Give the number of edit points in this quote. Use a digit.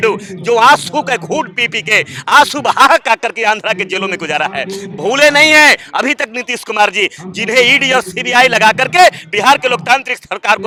0